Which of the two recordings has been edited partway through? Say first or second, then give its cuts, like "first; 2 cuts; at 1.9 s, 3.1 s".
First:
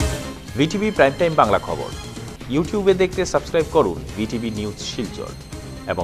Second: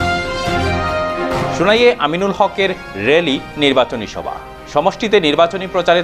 second; 1 cut; at 0.9 s